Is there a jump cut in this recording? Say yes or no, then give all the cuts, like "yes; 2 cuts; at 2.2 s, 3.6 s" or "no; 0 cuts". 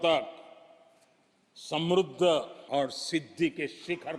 yes; 1 cut; at 2.6 s